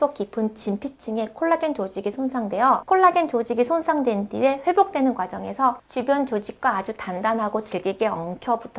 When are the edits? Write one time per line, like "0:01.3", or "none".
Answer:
none